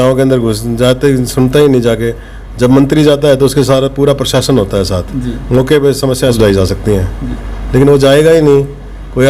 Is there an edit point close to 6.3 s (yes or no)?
yes